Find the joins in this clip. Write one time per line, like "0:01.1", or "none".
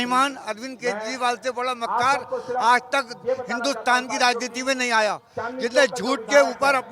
none

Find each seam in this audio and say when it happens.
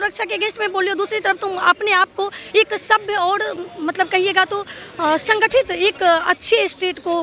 none

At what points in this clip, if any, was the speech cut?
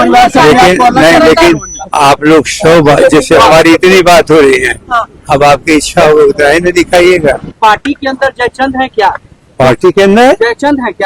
0:07.5

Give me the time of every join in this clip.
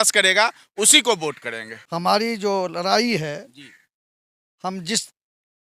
0:01.9

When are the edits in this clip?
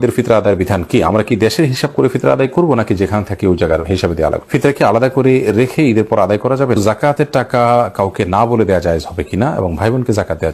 0:04.4
0:06.8

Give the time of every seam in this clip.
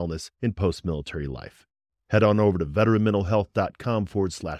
none

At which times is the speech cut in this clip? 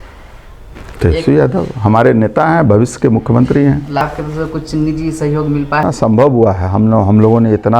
0:04.0
0:05.8

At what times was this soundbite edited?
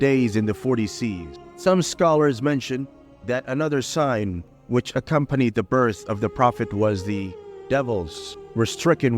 0:01.4

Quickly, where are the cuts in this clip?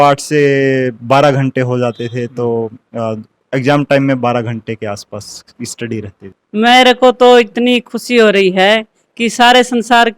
0:06.3

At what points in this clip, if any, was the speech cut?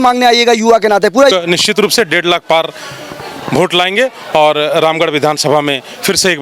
0:01.3

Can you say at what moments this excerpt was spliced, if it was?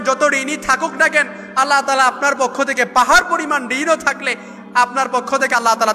none

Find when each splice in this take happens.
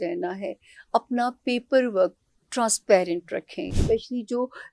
0:03.8

